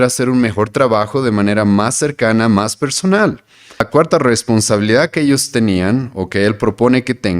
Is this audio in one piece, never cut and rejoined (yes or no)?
no